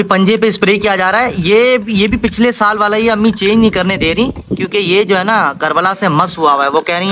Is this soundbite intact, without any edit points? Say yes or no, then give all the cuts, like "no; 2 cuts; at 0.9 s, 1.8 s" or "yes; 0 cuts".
yes; 0 cuts